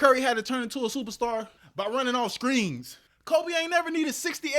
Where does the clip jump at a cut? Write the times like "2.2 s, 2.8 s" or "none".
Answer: 1.6 s